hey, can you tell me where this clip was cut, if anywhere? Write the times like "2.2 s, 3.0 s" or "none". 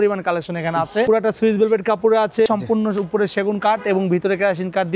1.0 s, 2.5 s